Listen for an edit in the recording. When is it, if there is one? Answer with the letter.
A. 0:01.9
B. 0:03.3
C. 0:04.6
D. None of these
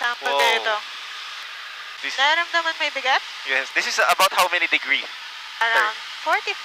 A